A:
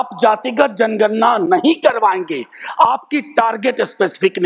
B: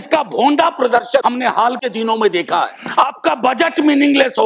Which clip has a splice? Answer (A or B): B